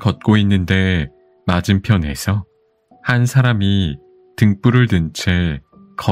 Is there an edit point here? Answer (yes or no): no